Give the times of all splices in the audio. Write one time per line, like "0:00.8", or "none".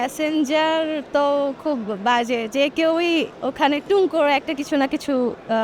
none